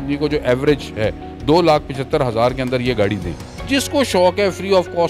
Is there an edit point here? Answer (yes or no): yes